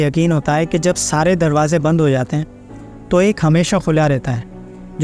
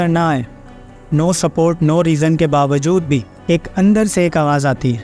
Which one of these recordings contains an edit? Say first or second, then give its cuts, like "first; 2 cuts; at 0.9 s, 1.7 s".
second; 1 cut; at 3.3 s